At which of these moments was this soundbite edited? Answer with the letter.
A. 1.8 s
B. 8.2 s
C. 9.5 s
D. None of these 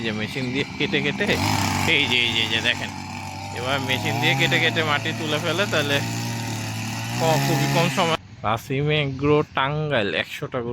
B